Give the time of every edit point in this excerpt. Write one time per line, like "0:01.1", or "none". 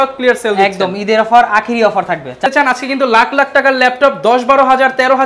0:02.5